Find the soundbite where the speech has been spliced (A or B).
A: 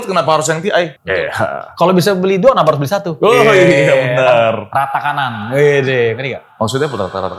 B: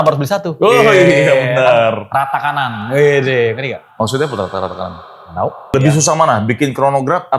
B